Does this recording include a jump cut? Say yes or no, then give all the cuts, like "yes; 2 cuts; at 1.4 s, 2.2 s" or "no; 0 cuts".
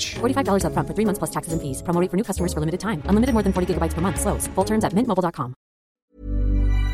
yes; 1 cut; at 6.0 s